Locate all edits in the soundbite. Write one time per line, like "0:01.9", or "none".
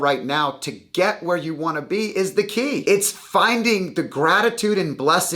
0:02.8